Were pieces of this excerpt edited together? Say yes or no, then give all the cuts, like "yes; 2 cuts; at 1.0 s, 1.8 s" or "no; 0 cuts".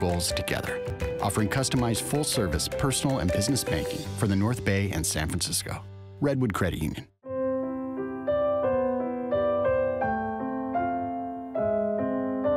no; 0 cuts